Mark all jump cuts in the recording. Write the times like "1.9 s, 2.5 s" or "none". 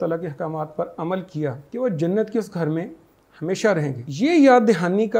1.6 s, 4.0 s